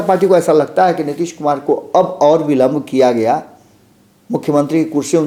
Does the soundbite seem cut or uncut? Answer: uncut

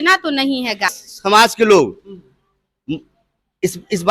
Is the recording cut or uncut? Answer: cut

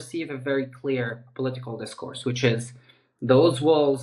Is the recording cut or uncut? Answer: uncut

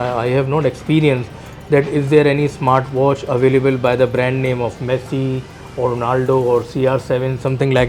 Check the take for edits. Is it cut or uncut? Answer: uncut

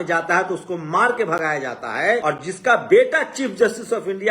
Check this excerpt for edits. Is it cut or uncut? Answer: cut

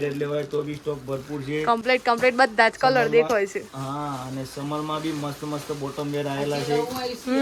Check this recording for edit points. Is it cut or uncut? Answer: uncut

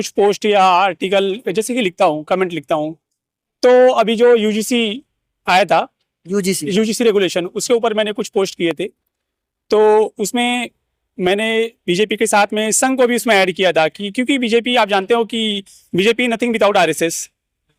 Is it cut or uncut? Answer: uncut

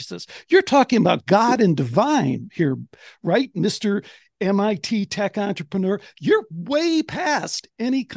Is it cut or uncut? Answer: uncut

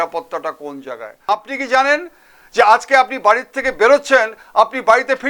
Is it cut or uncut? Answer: cut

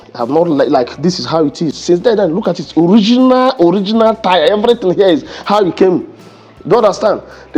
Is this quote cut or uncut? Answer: uncut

